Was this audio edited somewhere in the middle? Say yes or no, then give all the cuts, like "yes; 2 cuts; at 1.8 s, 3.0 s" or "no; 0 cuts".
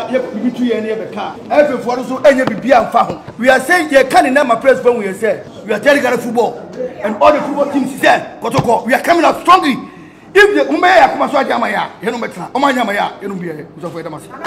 yes; 3 cuts; at 1.4 s, 3.2 s, 5.5 s